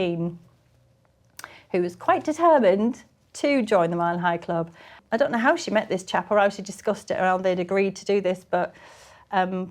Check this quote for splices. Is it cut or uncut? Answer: cut